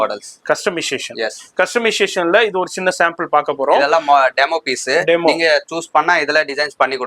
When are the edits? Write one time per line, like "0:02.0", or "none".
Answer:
none